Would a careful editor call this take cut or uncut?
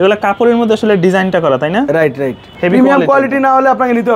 cut